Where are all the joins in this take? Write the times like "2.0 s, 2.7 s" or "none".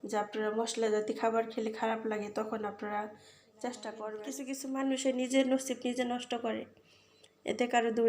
4.5 s